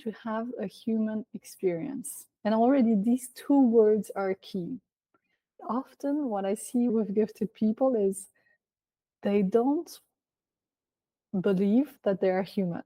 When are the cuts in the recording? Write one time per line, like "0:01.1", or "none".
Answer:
0:05.5
0:06.9
0:11.9